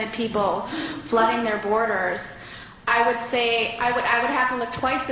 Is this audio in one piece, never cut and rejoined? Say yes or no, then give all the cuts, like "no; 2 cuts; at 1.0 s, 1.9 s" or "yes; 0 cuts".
no; 1 cut; at 2.8 s